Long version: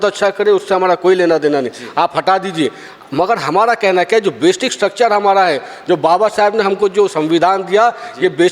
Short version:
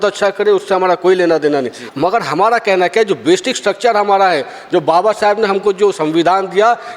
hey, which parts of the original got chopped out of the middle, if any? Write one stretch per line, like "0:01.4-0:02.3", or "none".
0:01.8-0:02.9